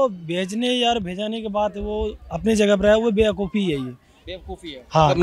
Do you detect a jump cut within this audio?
no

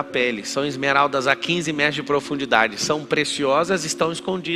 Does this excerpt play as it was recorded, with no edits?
yes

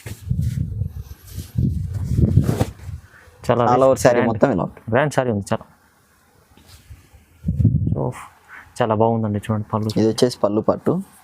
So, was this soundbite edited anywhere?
yes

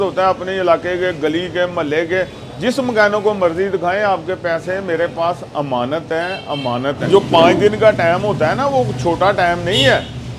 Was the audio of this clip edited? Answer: yes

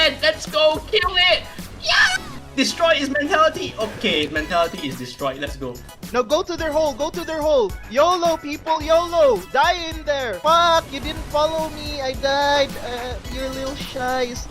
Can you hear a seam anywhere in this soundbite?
yes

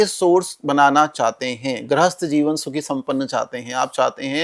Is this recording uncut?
yes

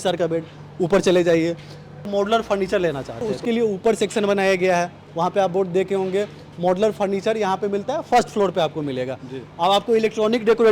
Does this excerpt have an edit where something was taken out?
no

